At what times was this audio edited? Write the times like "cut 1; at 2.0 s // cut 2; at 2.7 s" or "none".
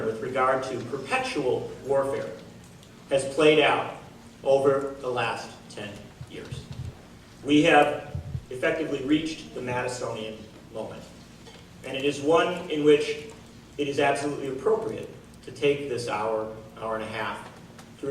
cut 1; at 11.2 s